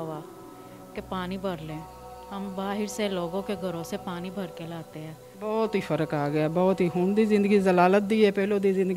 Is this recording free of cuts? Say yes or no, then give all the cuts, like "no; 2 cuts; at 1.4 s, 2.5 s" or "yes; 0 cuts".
no; 1 cut; at 5.2 s